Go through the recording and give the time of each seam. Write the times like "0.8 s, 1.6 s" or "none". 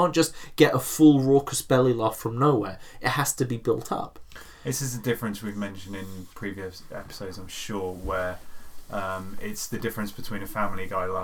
none

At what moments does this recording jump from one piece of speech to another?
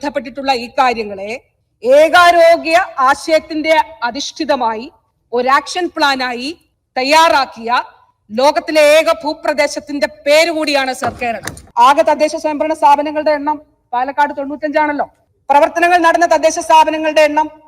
11.6 s

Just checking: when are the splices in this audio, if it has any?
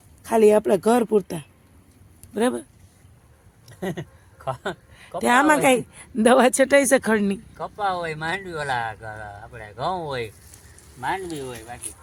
none

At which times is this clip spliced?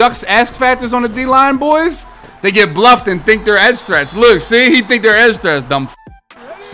none

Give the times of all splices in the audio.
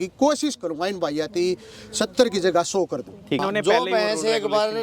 3.4 s

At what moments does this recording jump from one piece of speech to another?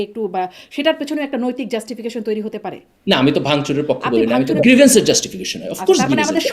2.9 s, 4.6 s

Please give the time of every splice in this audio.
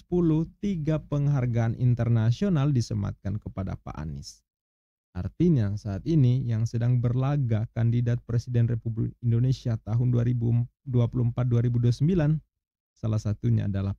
none

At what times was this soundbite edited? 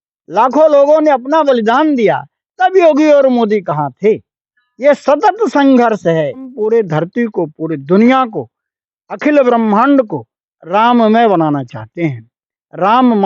6.6 s

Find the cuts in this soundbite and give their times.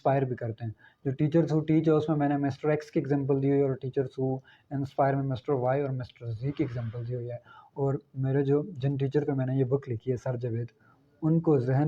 none

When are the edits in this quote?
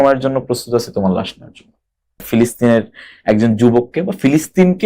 2.2 s

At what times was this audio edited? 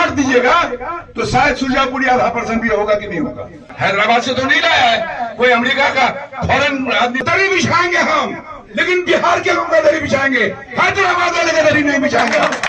3.6 s, 7.2 s

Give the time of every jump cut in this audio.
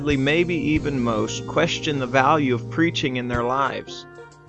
none

